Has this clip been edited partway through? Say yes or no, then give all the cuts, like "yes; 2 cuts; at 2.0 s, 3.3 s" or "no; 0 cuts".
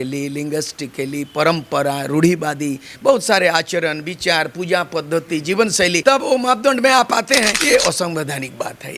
yes; 2 cuts; at 6.0 s, 7.6 s